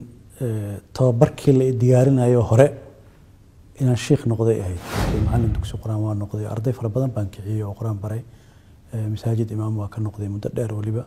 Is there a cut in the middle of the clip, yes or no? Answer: yes